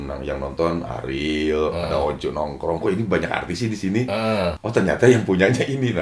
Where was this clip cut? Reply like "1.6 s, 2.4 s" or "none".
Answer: 4.6 s